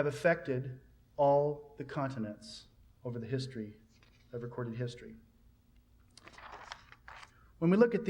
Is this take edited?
yes; 1 cut; at 6.5 s

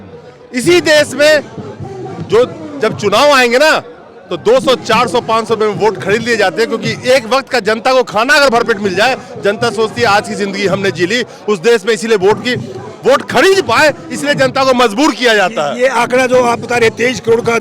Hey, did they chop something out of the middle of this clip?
no; 0 cuts

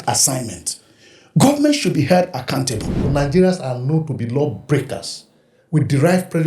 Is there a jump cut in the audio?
yes; 1 cut; at 3.1 s

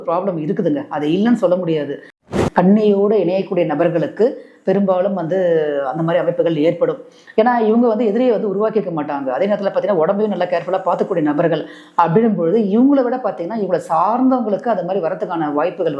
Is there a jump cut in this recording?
yes; 1 cut; at 2.2 s

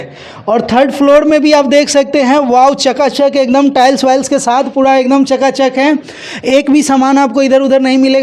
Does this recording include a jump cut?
no; 0 cuts

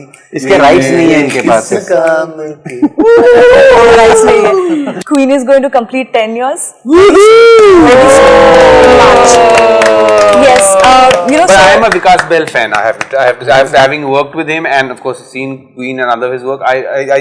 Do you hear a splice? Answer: yes; 1 cut; at 4.9 s

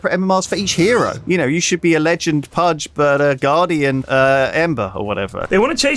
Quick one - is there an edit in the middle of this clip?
yes; 4 cuts; at 1.2 s, 2.8 s, 4.0 s, 4.9 s

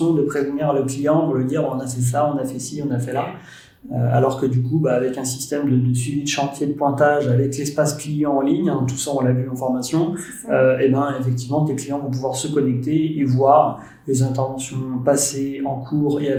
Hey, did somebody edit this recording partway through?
no; 0 cuts

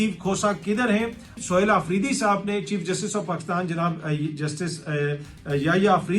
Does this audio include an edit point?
yes; 1 cut; at 1.4 s

